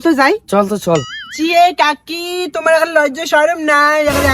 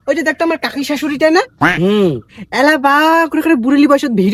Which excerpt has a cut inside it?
first; 1 cut; at 1.2 s

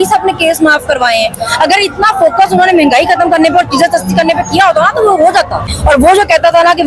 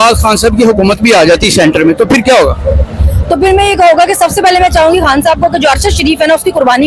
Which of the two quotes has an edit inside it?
first; 1 cut; at 5.7 s

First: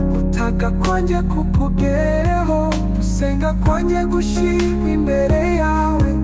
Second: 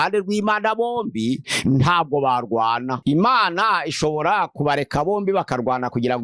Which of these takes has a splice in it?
second; 2 cuts; at 1.5 s, 3.0 s

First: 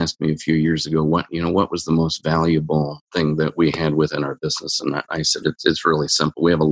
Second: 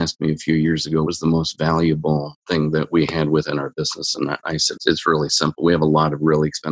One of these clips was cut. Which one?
second; 2 cuts; at 1.1 s, 4.8 s

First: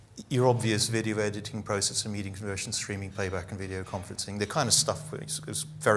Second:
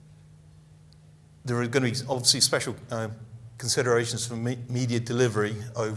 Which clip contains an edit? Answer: first; 1 cut; at 1.0 s

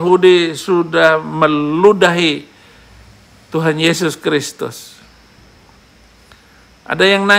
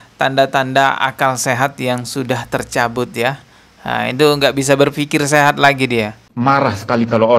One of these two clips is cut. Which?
second; 1 cut; at 6.3 s

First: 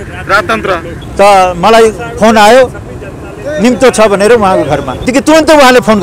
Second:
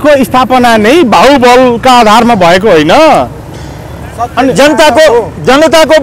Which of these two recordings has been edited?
first; 2 cuts; at 1.0 s, 5.0 s

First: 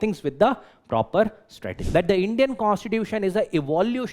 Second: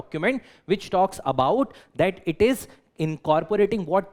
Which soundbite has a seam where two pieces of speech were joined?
first; 1 cut; at 1.7 s

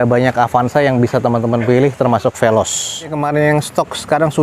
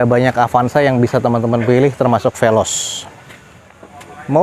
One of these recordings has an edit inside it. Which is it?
first; 1 cut; at 3.2 s

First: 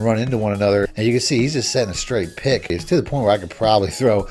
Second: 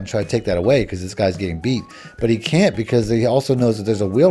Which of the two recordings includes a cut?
first; 2 cuts; at 0.9 s, 2.7 s

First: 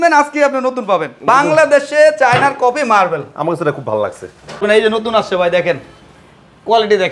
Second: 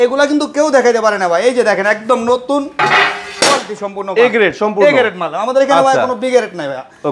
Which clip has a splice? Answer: first; 2 cuts; at 1.3 s, 4.6 s

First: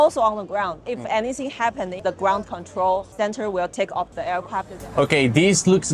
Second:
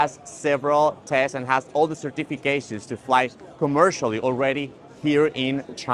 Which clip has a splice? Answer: first; 3 cuts; at 2.0 s, 3.1 s, 4.7 s

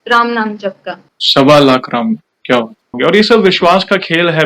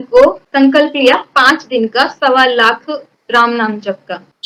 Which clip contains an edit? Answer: first; 1 cut; at 2.9 s

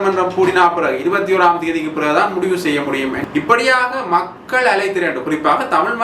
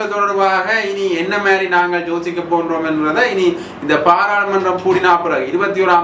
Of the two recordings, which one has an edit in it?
first; 1 cut; at 3.2 s

